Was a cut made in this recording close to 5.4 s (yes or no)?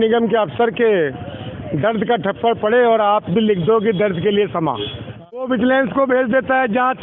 yes